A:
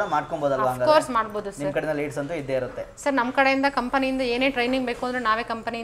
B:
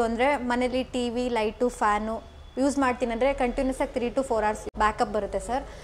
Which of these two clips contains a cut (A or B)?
B